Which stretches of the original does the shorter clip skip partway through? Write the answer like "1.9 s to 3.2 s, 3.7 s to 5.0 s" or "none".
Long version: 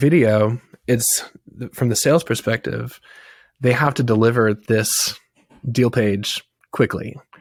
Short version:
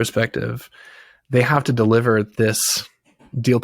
none